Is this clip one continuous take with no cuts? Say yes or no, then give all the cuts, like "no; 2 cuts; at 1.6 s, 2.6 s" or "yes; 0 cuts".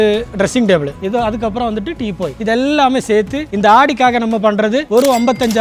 yes; 0 cuts